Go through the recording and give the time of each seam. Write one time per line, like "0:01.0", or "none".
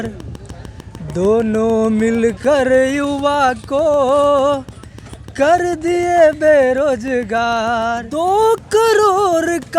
0:08.1